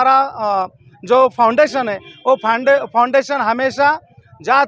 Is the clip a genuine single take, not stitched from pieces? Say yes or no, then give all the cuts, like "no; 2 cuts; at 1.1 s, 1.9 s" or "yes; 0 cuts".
yes; 0 cuts